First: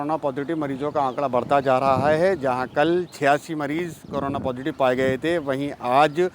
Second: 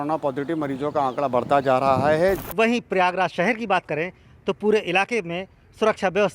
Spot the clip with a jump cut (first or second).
second